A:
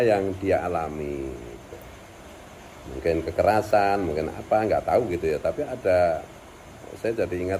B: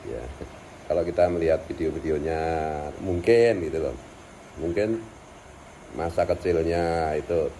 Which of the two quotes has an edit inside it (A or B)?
B